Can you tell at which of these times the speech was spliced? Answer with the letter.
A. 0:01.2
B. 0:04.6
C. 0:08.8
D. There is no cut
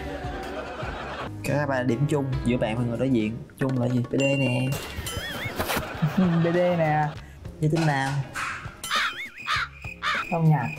A